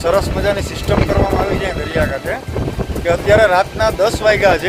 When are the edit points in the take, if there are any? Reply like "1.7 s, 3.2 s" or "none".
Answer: none